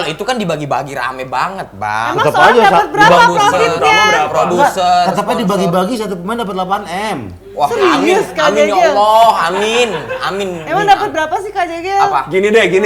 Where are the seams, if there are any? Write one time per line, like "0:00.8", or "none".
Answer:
none